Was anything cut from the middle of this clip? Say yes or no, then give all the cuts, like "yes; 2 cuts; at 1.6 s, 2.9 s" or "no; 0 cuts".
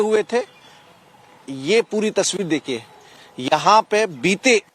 no; 0 cuts